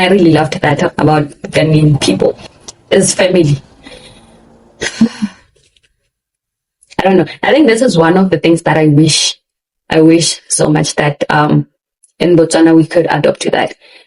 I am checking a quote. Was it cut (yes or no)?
yes